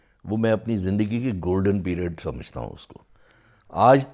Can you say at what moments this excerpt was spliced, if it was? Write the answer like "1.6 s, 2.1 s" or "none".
none

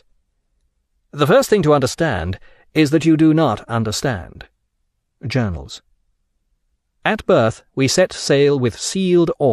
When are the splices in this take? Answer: 1.9 s

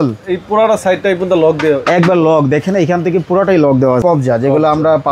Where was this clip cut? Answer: 4.0 s

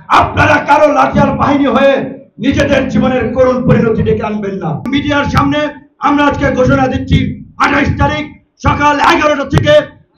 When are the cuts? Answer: 4.9 s

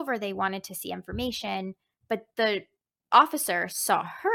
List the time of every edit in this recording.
none

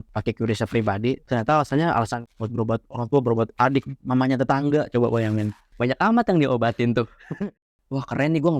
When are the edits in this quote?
1.2 s, 3.9 s, 7.6 s

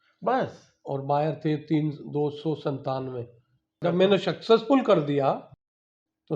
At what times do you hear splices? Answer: 3.8 s

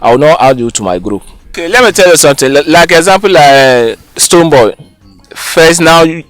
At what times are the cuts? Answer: 1.6 s

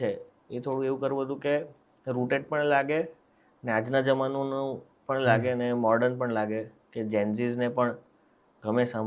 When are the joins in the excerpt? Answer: none

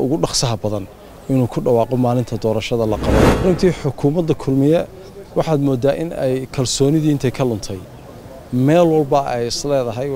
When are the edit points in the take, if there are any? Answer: 3.3 s

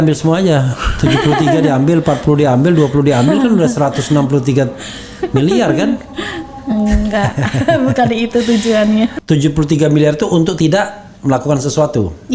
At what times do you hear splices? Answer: 9.2 s

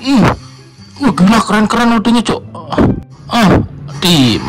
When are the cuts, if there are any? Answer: 3.1 s

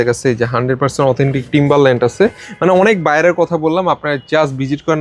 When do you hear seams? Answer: none

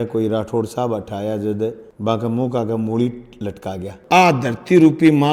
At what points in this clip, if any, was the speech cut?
4.0 s

